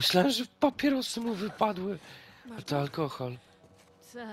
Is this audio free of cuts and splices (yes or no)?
yes